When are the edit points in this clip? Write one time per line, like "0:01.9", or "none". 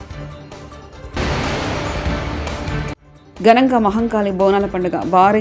0:01.1
0:03.1